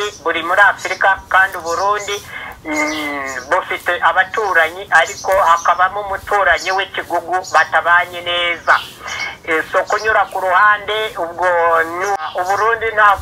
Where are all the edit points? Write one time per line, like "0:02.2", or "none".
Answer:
0:12.3